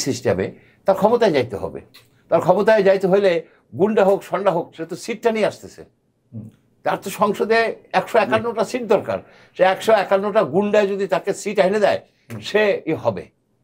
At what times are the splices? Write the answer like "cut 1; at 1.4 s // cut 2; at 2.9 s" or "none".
none